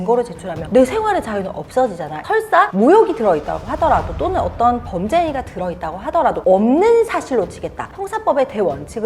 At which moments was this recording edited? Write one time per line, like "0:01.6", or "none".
0:02.2